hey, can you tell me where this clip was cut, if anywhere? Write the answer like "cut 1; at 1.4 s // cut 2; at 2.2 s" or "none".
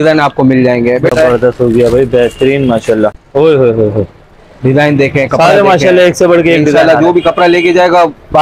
cut 1; at 1.1 s // cut 2; at 3.2 s